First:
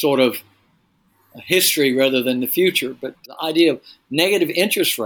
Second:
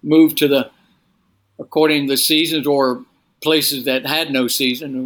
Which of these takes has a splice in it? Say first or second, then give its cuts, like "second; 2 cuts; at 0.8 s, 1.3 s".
first; 1 cut; at 3.3 s